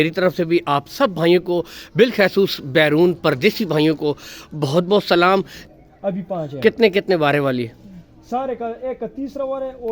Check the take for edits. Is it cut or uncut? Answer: cut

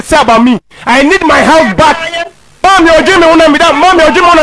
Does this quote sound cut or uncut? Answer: cut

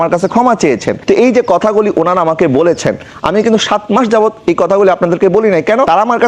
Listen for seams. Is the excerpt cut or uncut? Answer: uncut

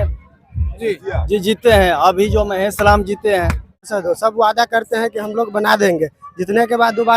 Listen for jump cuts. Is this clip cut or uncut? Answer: cut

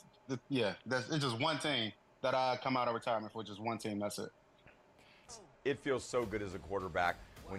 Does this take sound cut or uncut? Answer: cut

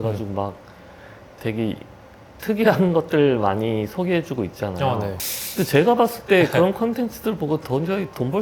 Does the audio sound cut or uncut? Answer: cut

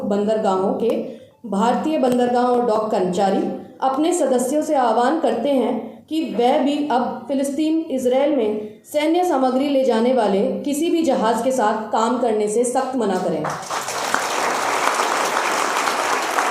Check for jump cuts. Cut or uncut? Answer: uncut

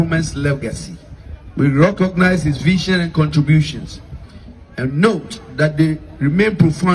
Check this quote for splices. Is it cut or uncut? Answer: uncut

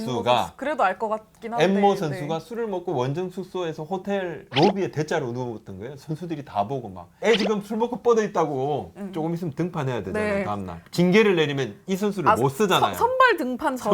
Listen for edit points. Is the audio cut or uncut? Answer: cut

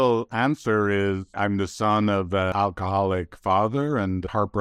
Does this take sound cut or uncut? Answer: cut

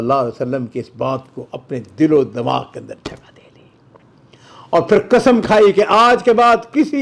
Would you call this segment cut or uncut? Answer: uncut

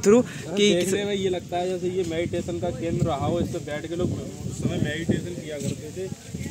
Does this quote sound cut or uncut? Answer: uncut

